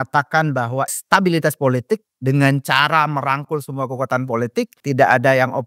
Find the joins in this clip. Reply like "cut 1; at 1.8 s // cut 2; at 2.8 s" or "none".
cut 1; at 1.0 s // cut 2; at 4.8 s